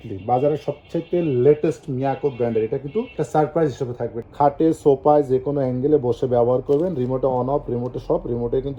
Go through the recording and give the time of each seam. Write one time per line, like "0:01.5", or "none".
0:04.2